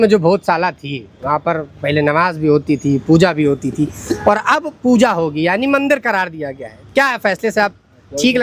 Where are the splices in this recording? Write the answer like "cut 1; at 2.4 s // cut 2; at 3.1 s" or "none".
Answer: none